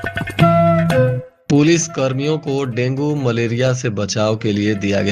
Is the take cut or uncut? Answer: cut